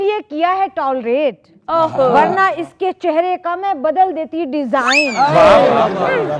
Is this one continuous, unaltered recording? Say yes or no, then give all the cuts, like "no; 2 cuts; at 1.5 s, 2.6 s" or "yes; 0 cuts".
yes; 0 cuts